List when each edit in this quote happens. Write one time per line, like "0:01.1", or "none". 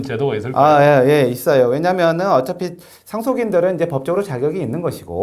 none